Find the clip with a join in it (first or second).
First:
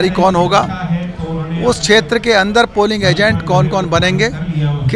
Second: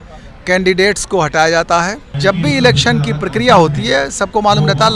second